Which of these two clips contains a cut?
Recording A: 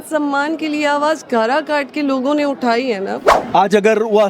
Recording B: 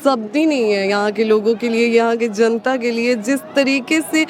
A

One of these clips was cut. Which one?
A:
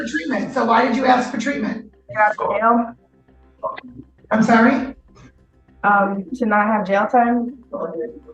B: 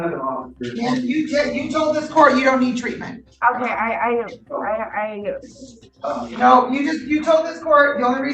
A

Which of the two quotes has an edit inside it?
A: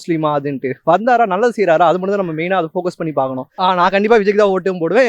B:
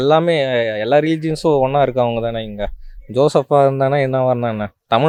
A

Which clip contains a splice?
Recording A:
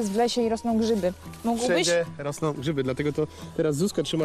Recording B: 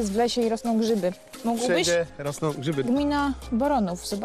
B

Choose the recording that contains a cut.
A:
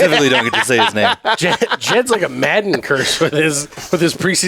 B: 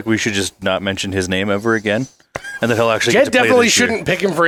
A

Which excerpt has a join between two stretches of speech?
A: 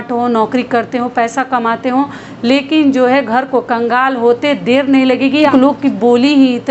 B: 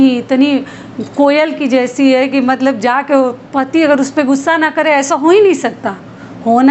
A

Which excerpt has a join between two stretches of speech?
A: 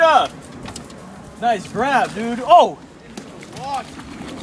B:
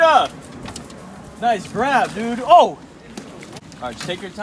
B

